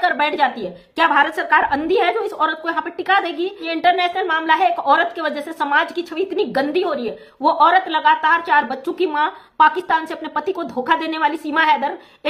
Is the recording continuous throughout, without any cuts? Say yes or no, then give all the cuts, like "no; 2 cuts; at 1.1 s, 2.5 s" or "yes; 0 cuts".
no; 1 cut; at 3.7 s